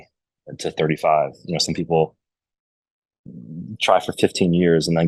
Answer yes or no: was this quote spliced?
no